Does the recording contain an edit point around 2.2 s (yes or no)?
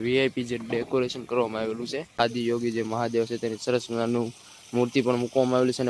yes